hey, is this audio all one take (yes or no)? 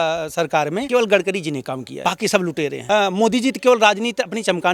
no